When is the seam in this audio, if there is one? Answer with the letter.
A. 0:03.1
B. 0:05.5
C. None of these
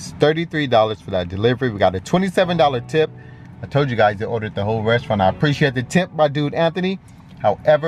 C